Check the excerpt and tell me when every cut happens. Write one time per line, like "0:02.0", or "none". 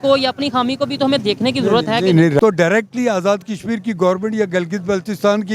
0:02.4